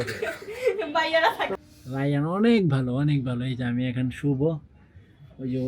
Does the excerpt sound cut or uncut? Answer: cut